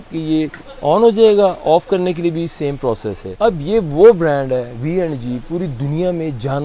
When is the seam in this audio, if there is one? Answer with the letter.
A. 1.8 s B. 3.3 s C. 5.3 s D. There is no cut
B